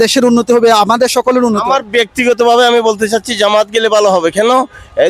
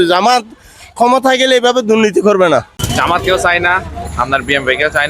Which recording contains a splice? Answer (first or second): second